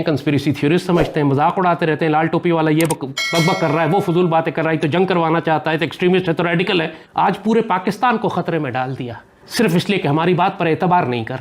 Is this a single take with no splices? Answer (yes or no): yes